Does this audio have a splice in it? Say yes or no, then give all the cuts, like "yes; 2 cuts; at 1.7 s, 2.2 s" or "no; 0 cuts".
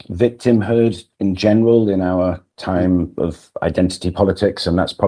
no; 0 cuts